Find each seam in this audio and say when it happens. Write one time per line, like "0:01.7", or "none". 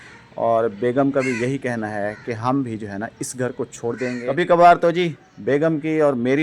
0:04.2